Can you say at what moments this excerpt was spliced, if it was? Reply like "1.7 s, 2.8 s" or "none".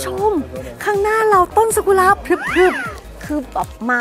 2.9 s